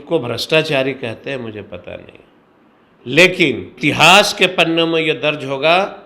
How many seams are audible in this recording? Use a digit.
1